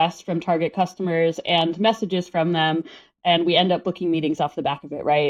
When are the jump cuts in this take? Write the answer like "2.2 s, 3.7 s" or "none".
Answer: none

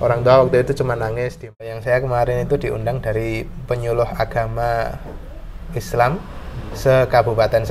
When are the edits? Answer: 1.7 s

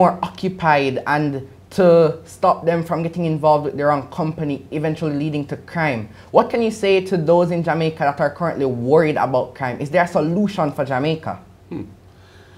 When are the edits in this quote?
11.5 s

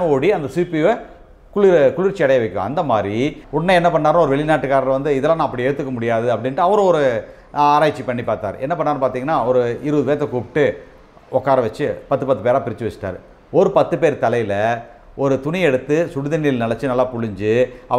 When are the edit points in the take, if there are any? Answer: 3.4 s

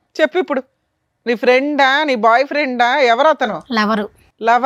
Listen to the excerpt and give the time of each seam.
none

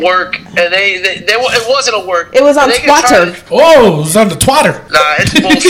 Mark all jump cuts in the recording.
3.4 s, 4.8 s

